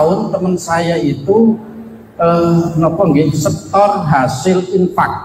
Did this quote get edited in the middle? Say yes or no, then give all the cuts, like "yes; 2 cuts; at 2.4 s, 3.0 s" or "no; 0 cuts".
no; 0 cuts